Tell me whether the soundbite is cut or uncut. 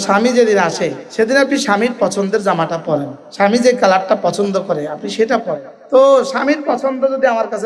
cut